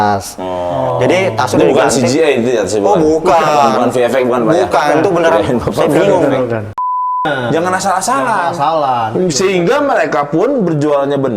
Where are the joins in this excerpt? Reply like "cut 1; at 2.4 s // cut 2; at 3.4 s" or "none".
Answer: cut 1; at 6.9 s